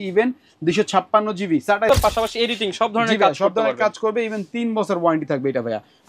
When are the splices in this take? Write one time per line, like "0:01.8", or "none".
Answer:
0:01.9